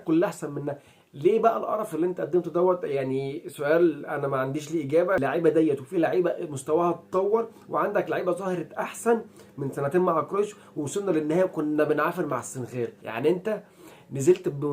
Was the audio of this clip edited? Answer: yes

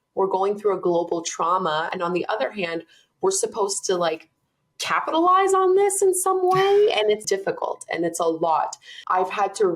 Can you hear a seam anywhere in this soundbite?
yes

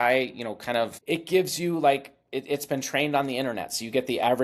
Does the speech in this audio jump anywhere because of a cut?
yes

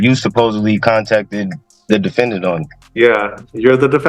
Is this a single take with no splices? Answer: no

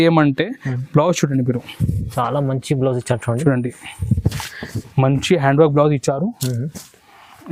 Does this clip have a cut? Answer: no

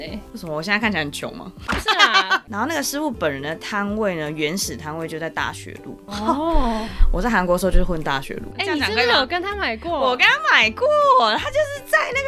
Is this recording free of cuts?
no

